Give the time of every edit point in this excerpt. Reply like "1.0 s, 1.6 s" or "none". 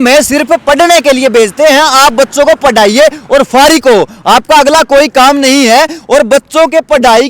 none